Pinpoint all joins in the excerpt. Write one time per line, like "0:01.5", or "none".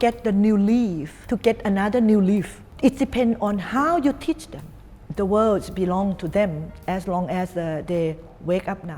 0:01.2
0:02.6
0:05.0